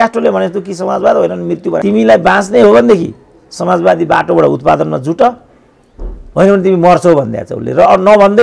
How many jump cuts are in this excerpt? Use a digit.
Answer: 1